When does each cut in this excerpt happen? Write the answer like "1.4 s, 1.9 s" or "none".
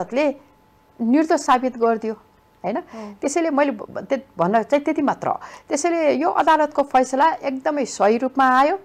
none